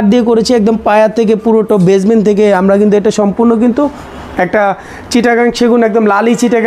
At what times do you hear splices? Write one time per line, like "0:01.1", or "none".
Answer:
none